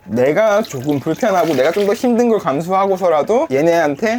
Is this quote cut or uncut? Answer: uncut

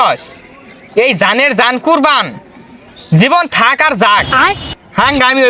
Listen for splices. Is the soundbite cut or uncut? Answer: uncut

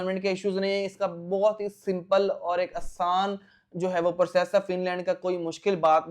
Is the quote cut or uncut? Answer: uncut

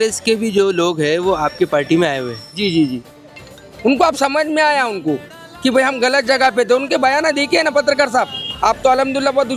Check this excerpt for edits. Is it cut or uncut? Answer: uncut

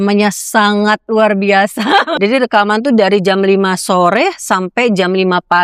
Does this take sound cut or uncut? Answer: cut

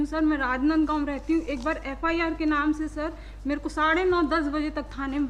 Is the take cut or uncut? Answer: uncut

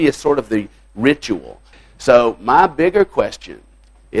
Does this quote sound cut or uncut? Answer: cut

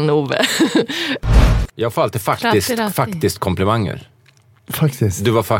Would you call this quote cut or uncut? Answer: cut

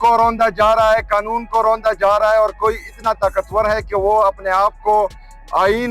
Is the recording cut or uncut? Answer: uncut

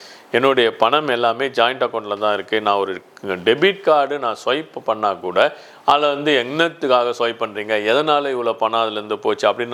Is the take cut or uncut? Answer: uncut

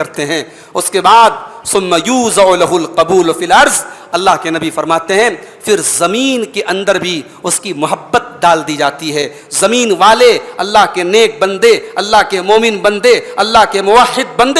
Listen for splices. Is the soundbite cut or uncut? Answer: uncut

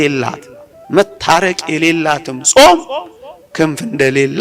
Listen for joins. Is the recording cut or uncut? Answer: uncut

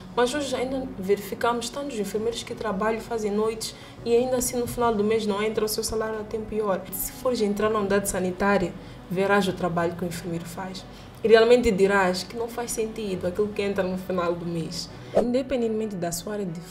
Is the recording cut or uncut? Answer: cut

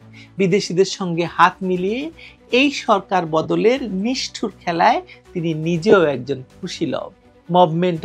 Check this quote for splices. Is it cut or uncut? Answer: uncut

